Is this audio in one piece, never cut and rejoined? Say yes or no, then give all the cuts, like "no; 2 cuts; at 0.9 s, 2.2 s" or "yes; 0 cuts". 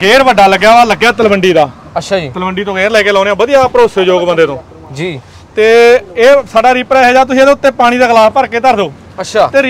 yes; 0 cuts